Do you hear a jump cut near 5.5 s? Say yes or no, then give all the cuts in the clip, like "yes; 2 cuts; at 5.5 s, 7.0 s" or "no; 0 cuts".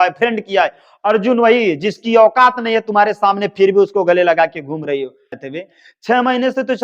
yes; 1 cut; at 5.5 s